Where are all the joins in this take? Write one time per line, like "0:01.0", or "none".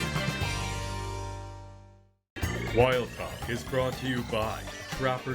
0:01.7